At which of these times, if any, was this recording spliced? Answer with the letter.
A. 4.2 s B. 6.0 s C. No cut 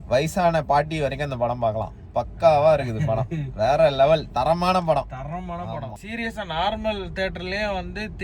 B